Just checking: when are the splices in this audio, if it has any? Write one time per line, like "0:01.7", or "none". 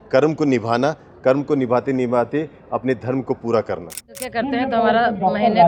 0:04.2